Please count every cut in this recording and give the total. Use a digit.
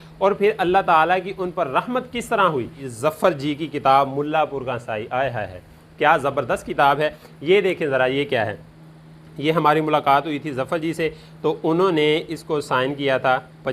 2